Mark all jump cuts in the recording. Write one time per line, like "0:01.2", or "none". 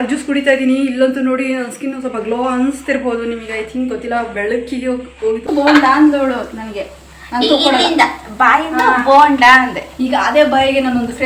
0:05.5